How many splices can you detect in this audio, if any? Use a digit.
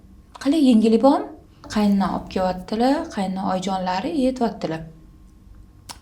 1